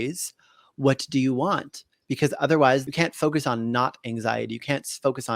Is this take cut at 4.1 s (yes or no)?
no